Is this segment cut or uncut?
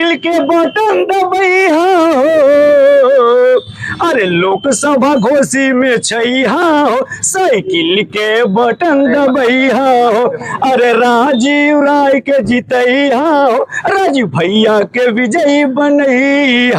uncut